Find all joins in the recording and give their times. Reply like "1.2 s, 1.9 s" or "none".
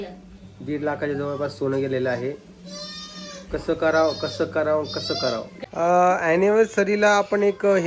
5.5 s

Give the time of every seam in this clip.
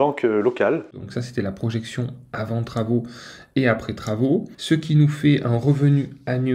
1.0 s, 4.5 s

